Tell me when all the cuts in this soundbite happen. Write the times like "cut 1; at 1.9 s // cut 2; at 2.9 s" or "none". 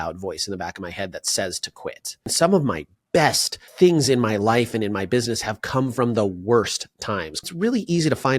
cut 1; at 2.3 s // cut 2; at 7.4 s